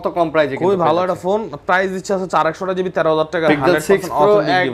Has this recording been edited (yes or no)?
yes